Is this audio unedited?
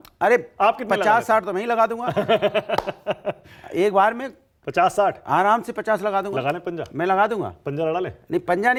yes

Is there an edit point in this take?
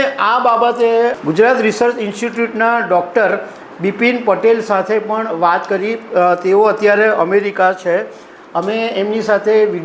yes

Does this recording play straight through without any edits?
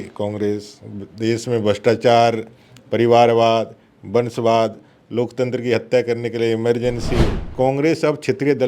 no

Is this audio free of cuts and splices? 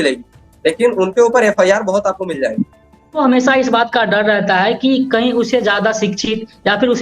no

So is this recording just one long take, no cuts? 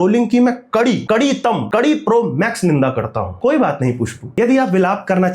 no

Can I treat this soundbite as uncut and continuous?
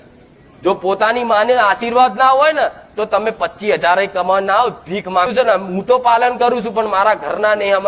no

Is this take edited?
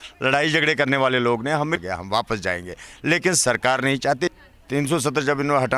yes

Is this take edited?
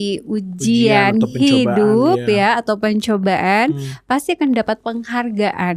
no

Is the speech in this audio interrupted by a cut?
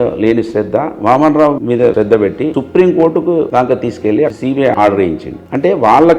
yes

